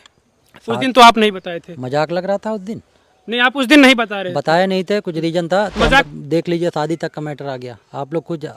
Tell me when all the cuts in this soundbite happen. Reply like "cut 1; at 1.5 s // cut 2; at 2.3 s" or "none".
cut 1; at 6.0 s